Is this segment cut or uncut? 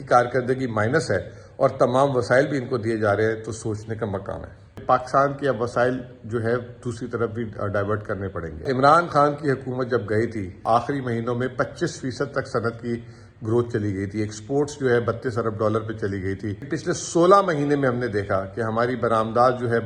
cut